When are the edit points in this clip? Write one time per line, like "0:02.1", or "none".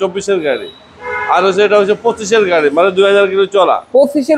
none